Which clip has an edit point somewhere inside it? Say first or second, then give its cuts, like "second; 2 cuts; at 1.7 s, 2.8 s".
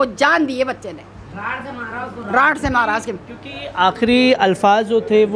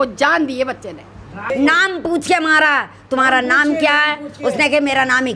second; 1 cut; at 1.5 s